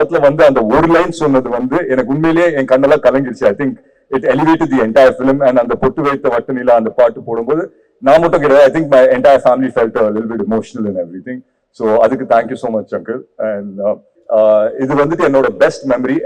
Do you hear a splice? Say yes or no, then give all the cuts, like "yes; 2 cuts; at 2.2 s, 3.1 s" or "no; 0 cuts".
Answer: yes; 1 cut; at 14.1 s